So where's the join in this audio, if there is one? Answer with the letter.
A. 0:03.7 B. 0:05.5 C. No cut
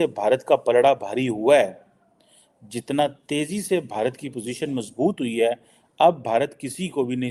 C